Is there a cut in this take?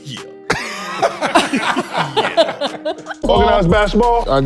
yes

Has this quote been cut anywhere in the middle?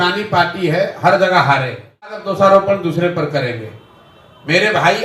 yes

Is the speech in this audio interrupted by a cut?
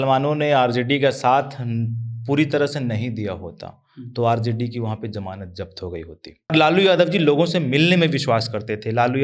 yes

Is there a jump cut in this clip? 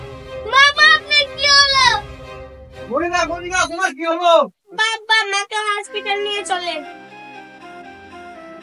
no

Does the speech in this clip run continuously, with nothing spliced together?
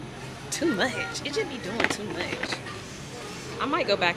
yes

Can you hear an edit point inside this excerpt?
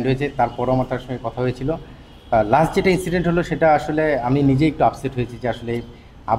no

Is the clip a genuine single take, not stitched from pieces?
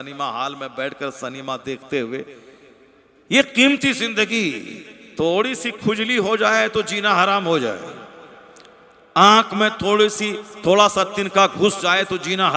yes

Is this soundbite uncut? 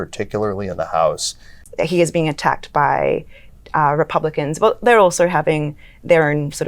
no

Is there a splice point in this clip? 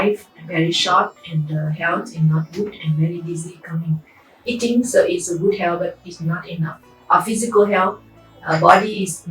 yes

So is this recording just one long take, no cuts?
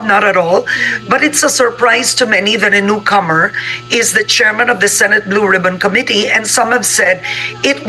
yes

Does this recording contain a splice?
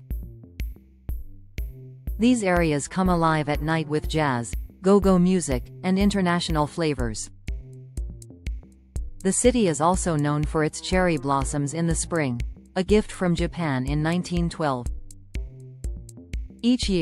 yes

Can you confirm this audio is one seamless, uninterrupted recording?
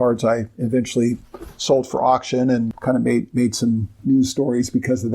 no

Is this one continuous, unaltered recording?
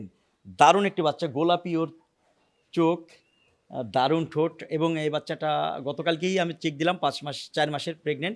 yes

